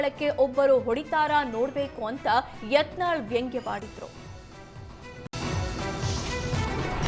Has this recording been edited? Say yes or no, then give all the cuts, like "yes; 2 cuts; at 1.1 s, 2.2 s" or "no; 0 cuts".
yes; 1 cut; at 5.3 s